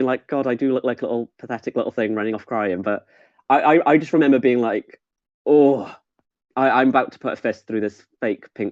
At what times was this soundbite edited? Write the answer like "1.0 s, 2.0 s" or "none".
none